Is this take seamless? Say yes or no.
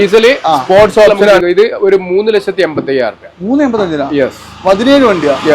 no